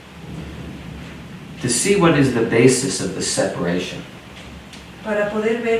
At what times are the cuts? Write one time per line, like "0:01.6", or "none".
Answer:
none